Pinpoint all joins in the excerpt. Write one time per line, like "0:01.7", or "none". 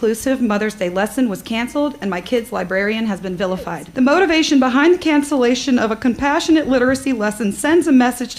0:03.8